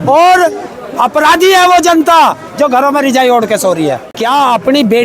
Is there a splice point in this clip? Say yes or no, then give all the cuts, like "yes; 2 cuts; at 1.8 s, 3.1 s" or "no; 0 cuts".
yes; 1 cut; at 4.1 s